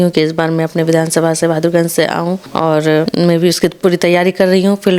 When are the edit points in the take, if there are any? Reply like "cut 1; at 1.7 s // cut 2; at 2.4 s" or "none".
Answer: cut 1; at 2.5 s // cut 2; at 3.1 s